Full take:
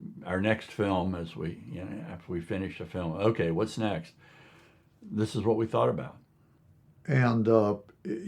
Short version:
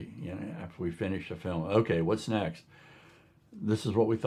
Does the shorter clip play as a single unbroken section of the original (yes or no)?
yes